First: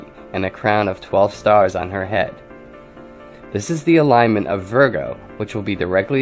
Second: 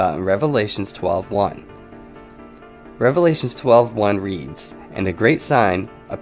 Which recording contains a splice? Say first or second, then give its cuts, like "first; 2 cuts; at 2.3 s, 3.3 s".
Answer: first; 1 cut; at 1.1 s